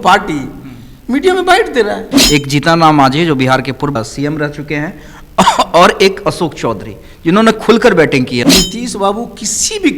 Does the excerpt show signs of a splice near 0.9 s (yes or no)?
no